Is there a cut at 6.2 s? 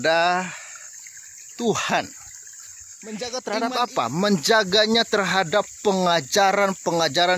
no; 1 cut; at 3.1 s

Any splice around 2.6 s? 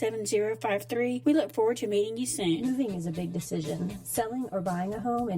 yes; 1 cut; at 2.6 s

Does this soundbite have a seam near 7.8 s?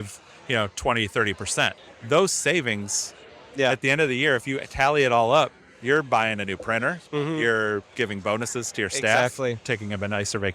no; 2 cuts; at 1.8 s, 9.6 s

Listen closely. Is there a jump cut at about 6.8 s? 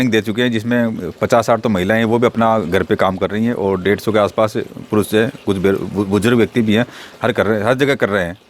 no; 0 cuts

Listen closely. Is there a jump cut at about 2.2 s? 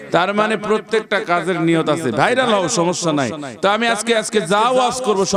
no; 0 cuts

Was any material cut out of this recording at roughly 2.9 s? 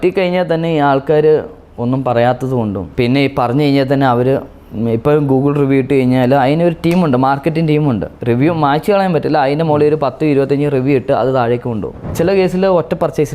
yes; 3 cuts; at 2.9 s, 8.1 s, 12.0 s

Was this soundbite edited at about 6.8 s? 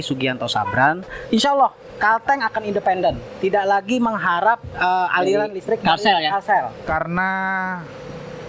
yes; 2 cuts; at 1.1 s, 6.8 s

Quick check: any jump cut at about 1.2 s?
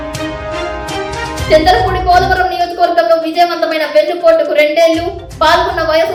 no; 0 cuts

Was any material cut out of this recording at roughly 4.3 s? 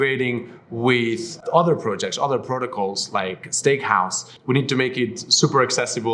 yes; 1 cut; at 4.3 s

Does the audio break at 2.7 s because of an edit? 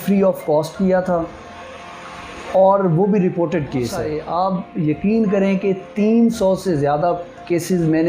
no; 1 cut; at 4.2 s

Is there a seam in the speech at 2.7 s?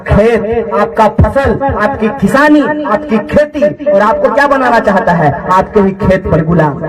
no; 0 cuts

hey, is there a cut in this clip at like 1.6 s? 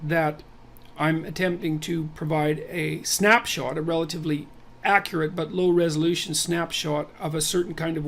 yes; 1 cut; at 1.6 s

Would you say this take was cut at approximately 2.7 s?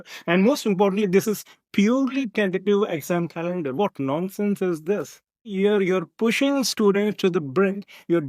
no; 1 cut; at 5.5 s

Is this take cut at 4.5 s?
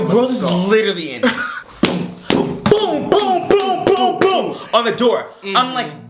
no; 1 cut; at 1.5 s

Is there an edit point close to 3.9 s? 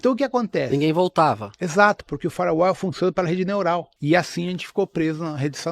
yes; 1 cut; at 3.9 s

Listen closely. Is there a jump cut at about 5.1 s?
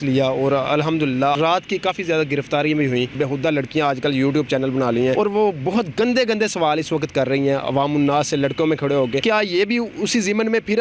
yes; 4 cuts; at 1.3 s, 3.1 s, 5.1 s, 9.2 s

